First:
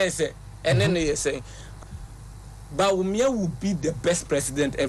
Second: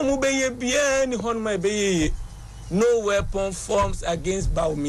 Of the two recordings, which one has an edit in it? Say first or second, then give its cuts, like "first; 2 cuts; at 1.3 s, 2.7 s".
first; 1 cut; at 1.8 s